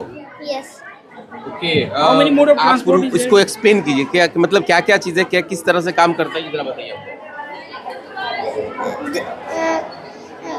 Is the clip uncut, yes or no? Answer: yes